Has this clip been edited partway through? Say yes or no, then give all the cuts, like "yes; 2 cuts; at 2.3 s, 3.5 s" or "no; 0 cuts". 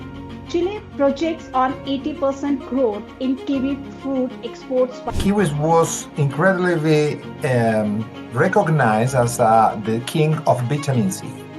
yes; 1 cut; at 5.0 s